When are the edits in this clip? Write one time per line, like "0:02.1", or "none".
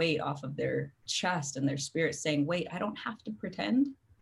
0:01.0